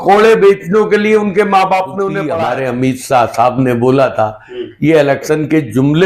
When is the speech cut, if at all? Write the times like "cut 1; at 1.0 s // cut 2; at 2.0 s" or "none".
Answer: cut 1; at 2.3 s